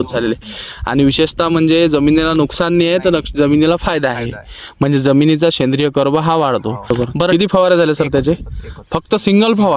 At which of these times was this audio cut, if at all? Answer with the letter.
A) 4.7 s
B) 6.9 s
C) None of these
B